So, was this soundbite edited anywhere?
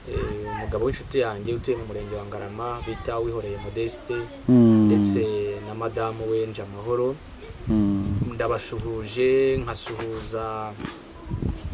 no; 0 cuts

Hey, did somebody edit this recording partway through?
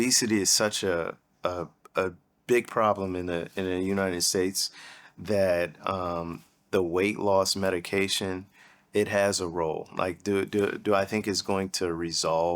yes; 1 cut; at 2.3 s

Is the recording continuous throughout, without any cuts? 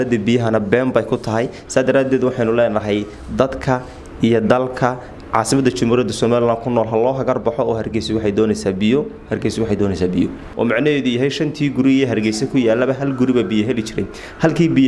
no; 1 cut; at 10.4 s

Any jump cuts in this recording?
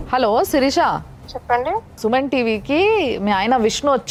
no; 0 cuts

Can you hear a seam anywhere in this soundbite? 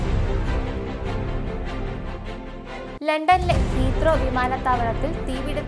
yes; 1 cut; at 1.1 s

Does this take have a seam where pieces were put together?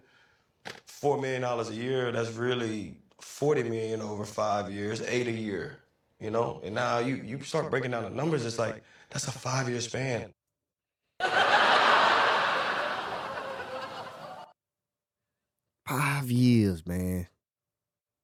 no; 0 cuts

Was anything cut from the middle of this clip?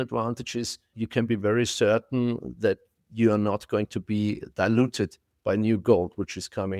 yes; 1 cut; at 0.9 s

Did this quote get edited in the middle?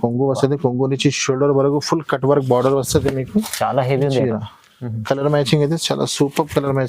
yes; 1 cut; at 5.0 s

